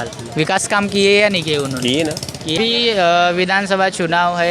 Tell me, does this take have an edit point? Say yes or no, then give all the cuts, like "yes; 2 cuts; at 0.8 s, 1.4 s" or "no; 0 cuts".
yes; 1 cut; at 2.6 s